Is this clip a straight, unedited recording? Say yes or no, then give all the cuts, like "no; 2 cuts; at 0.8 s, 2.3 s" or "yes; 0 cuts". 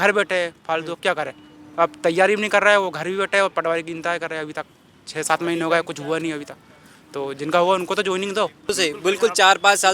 no; 1 cut; at 8.7 s